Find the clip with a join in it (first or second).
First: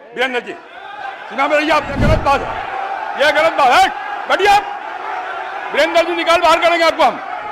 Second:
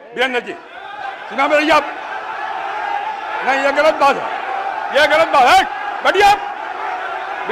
first